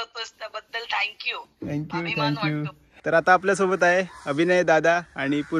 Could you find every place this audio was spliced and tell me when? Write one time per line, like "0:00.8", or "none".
0:02.8